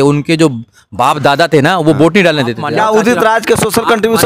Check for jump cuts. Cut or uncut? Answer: cut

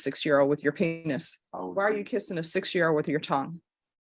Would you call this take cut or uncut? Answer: cut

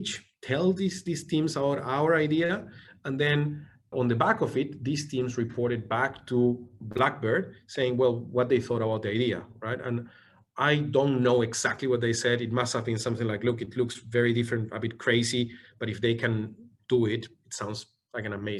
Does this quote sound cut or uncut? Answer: uncut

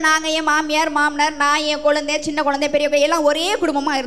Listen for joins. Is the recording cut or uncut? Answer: uncut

